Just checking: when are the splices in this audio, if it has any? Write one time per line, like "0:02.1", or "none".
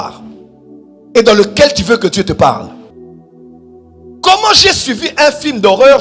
0:02.9